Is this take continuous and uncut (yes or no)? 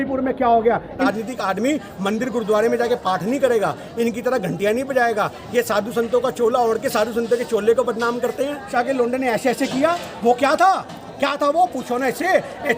no